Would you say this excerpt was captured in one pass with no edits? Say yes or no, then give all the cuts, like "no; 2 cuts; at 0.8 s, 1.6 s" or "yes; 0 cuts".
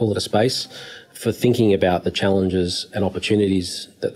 no; 1 cut; at 1.1 s